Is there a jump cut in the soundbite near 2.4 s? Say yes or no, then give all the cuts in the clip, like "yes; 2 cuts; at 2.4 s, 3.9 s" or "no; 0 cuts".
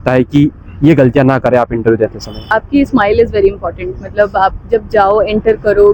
yes; 1 cut; at 2.4 s